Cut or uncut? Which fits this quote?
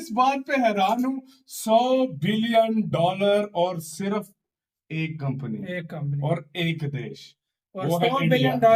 uncut